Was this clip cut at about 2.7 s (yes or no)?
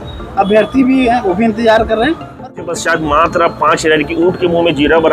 yes